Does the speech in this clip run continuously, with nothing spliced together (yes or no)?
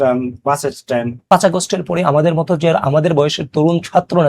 no